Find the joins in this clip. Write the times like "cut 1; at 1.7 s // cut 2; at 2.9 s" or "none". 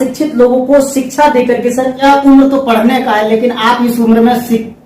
cut 1; at 2.0 s